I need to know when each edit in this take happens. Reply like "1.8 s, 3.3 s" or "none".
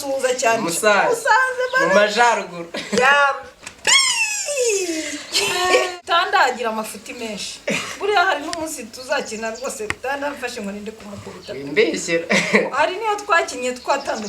5.9 s